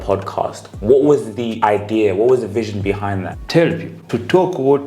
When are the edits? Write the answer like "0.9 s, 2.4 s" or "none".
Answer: 1.4 s, 3.3 s, 3.9 s